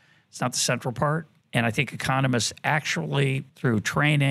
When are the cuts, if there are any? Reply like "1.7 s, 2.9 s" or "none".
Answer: 1.3 s, 3.5 s